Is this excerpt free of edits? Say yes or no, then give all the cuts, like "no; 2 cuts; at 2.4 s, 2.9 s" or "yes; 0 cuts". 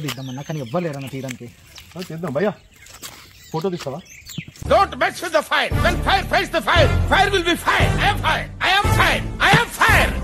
yes; 0 cuts